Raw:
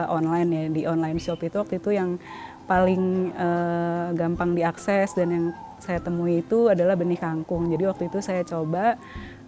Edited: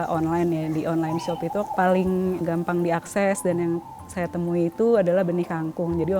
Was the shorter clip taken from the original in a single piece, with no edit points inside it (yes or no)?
no